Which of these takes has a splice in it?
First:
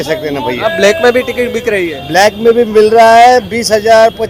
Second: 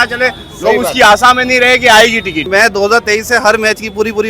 second; 1 cut; at 2.5 s

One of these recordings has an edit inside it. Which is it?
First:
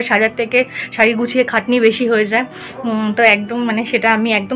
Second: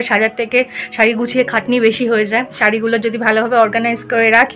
second; 1 cut; at 2.5 s

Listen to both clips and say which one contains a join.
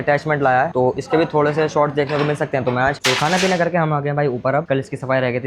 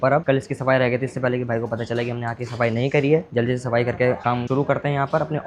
first; 1 cut; at 3.0 s

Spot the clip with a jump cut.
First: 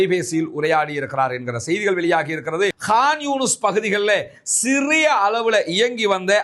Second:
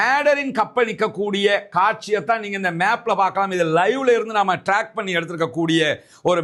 first; 1 cut; at 2.8 s

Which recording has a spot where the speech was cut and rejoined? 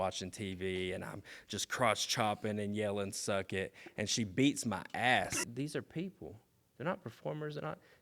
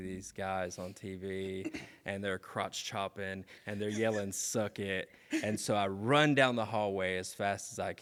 first; 1 cut; at 5.4 s

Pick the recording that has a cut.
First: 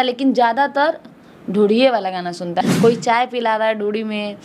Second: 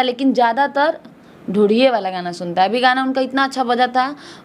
first; 1 cut; at 2.6 s

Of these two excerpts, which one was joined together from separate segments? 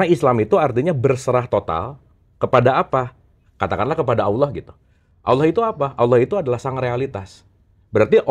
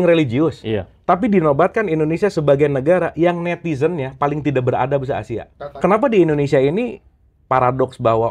second; 1 cut; at 5.8 s

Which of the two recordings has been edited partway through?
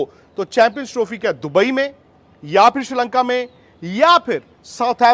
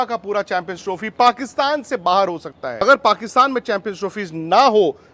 second; 1 cut; at 2.8 s

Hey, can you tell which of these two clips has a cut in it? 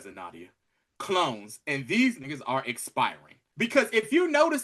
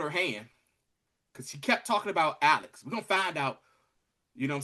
first; 1 cut; at 3.4 s

